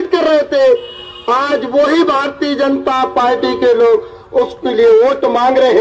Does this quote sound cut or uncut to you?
uncut